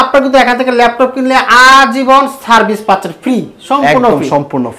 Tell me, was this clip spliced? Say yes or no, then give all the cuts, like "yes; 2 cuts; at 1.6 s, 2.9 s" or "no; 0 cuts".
no; 0 cuts